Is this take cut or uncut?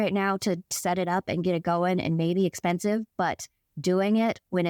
uncut